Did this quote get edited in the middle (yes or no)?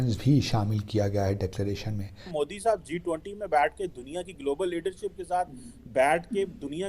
yes